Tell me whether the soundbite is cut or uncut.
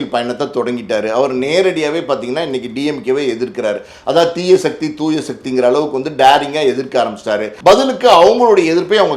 cut